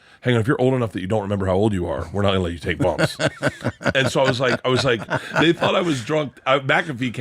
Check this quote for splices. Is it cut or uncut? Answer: cut